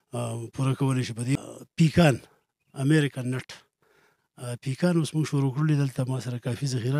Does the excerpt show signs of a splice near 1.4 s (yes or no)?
yes